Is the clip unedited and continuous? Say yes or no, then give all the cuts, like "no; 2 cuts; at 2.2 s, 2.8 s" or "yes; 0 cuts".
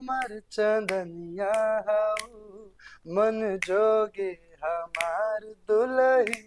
yes; 0 cuts